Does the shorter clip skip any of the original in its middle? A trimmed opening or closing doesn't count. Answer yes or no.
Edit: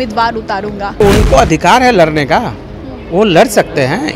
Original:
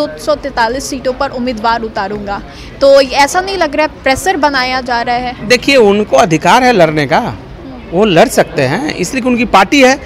yes